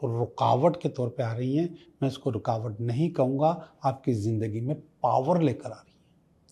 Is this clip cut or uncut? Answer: uncut